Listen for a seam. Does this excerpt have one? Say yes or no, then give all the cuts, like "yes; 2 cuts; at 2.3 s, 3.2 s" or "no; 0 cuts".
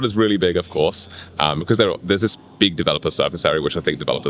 no; 0 cuts